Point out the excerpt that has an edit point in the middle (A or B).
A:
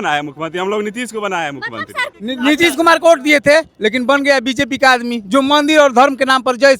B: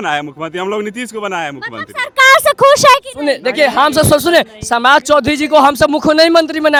A